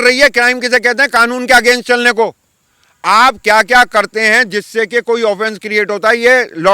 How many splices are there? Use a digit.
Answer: 0